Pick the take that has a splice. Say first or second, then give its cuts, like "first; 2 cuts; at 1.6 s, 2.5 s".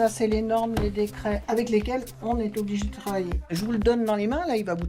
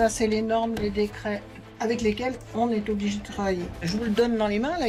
first; 1 cut; at 1.4 s